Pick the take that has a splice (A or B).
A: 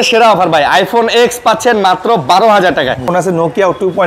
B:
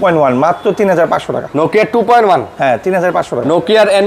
A